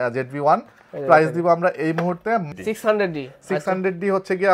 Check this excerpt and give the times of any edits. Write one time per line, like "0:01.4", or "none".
0:02.4

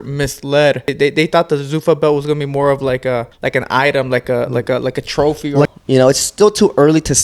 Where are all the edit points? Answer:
0:00.9
0:03.3
0:05.7

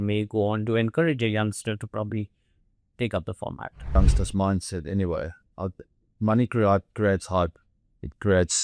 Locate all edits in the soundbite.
0:04.0

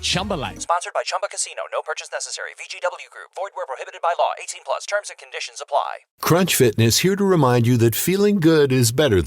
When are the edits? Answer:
0:06.1

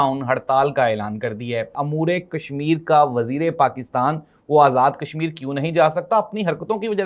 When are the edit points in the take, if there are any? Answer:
0:01.8

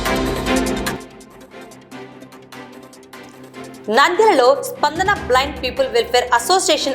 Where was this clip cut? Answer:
0:00.9
0:02.8
0:03.8

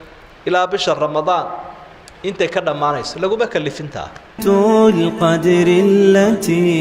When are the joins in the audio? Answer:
0:04.4

